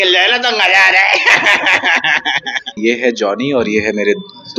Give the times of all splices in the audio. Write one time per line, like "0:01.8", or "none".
0:02.8